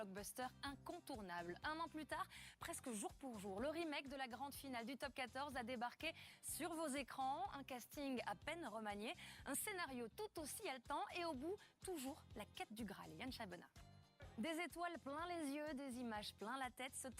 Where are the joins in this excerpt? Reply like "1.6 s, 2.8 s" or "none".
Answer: 11.2 s